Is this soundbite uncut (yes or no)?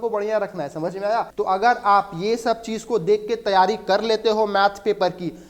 no